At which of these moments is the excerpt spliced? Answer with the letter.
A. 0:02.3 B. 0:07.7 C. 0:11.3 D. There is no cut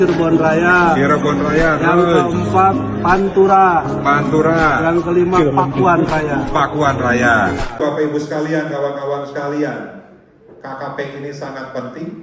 B